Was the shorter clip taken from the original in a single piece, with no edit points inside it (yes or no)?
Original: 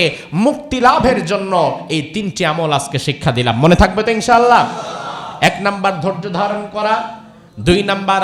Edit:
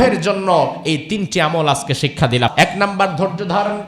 no